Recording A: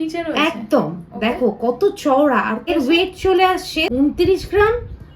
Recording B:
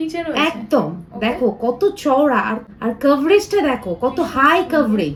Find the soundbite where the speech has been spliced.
A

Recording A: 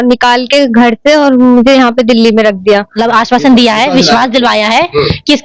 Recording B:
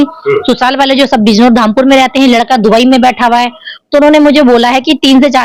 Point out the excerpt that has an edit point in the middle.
A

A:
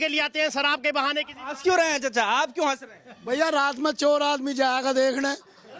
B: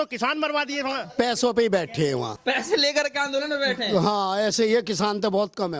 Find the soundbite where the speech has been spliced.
B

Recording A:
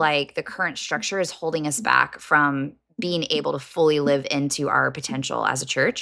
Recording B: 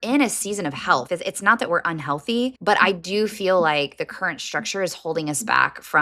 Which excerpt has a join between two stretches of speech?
B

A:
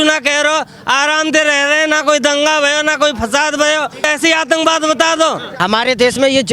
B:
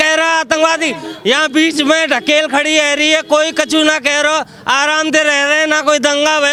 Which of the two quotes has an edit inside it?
A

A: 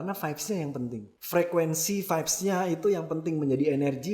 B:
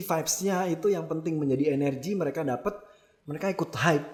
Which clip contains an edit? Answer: A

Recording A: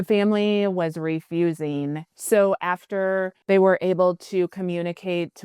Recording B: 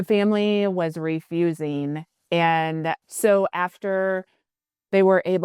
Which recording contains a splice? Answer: A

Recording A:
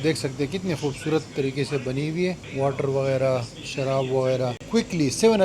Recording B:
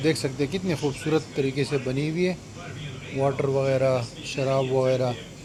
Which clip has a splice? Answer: A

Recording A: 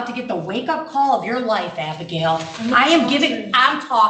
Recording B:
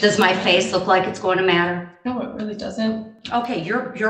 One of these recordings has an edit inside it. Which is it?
B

